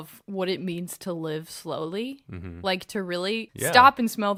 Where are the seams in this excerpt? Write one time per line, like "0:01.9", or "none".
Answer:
none